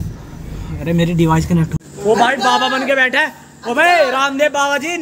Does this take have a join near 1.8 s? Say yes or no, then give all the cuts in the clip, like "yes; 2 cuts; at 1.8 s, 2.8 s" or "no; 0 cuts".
yes; 1 cut; at 1.8 s